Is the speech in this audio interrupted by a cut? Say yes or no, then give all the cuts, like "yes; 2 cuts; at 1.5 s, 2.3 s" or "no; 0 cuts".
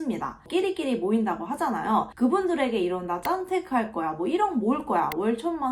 yes; 1 cut; at 2.1 s